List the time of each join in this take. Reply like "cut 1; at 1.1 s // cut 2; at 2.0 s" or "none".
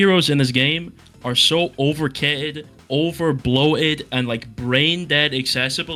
none